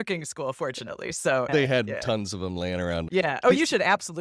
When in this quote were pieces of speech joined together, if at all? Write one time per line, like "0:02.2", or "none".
0:01.5
0:03.1